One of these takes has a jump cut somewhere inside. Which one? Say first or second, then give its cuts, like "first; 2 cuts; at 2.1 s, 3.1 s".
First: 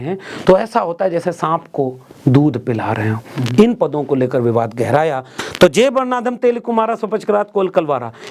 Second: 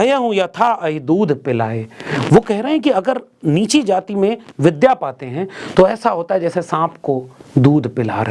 first; 1 cut; at 5.3 s